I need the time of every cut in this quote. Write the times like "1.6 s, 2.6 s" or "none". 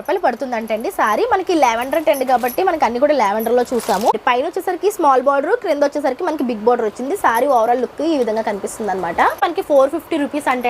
4.1 s, 9.4 s